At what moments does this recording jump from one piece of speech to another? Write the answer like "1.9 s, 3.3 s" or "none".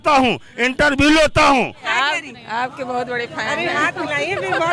1.8 s